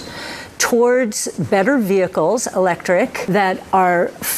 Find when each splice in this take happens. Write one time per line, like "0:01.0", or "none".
0:03.2